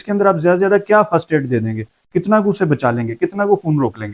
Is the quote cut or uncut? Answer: uncut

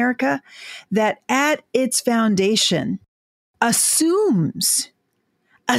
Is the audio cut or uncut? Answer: uncut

